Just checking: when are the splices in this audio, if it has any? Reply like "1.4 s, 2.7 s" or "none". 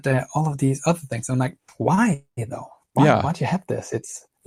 none

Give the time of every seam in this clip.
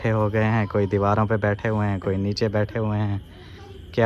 none

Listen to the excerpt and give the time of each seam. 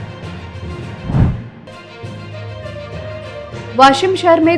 none

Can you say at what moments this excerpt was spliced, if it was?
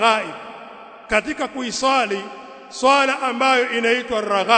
none

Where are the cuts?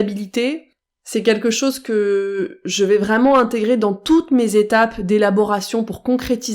none

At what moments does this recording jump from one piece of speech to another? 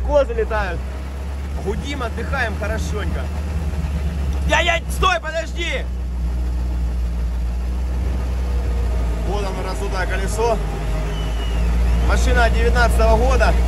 none

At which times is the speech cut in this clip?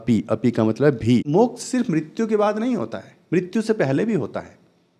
1.3 s

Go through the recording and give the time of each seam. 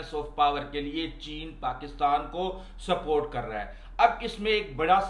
none

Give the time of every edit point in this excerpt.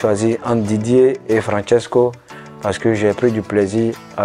1.2 s

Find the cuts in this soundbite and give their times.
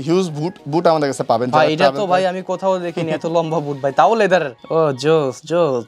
4.5 s

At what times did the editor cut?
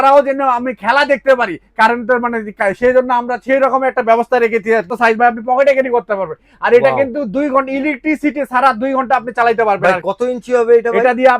4.9 s

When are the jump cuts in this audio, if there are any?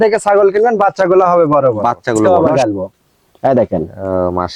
2.2 s

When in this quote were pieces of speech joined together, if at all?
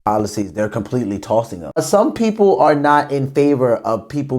1.8 s

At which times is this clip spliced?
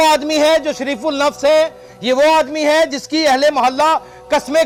none

